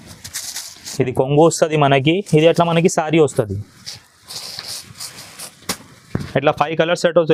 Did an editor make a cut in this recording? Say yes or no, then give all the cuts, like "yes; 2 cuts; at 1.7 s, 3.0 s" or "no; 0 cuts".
no; 0 cuts